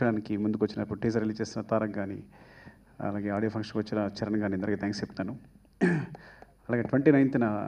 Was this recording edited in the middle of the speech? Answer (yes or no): no